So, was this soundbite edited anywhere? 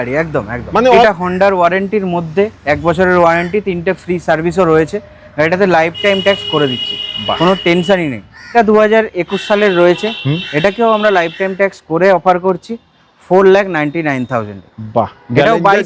yes; 2 cuts; at 1.0 s, 8.5 s

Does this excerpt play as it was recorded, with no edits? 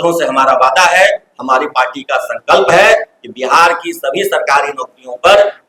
yes; 0 cuts

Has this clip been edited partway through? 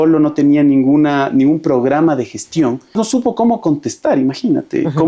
yes; 1 cut; at 2.9 s

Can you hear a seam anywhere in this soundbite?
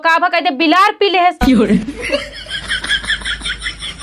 yes; 1 cut; at 1.4 s

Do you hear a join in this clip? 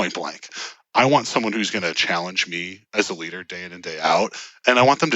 no; 0 cuts

